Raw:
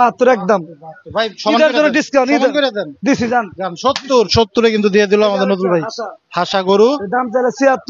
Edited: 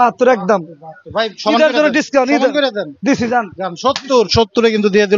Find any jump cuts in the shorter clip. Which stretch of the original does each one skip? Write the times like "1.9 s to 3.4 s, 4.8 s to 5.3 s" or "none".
none

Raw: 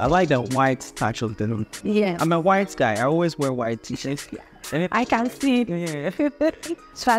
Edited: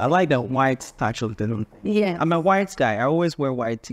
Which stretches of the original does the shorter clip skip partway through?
none

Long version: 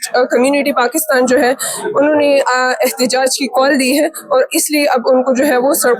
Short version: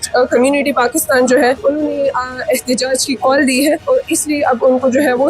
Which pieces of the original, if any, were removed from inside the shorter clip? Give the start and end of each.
1.6 s to 1.9 s, 4.1 s to 4.3 s

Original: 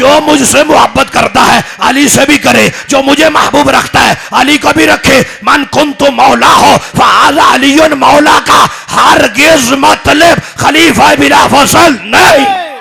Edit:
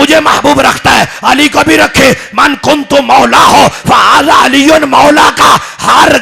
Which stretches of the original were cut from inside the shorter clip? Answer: none

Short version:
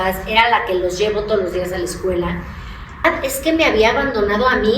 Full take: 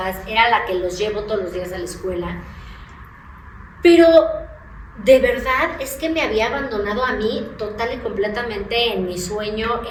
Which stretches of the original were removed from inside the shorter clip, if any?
3.0 s to 5.6 s

